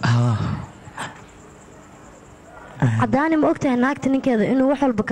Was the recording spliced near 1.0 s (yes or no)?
yes